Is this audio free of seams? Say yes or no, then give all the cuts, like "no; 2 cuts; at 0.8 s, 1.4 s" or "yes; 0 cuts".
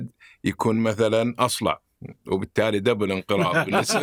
yes; 0 cuts